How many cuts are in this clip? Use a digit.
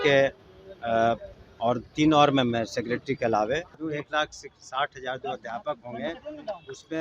1